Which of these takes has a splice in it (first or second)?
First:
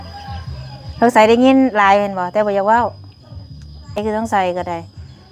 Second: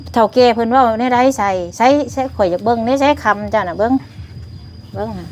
first